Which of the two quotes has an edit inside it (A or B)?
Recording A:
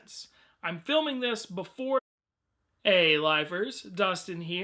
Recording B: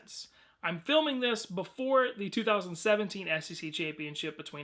B